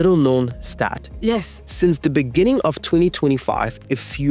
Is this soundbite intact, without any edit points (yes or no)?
yes